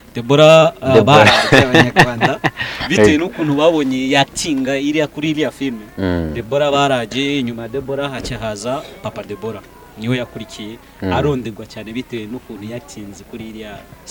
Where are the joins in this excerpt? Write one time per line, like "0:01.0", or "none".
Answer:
none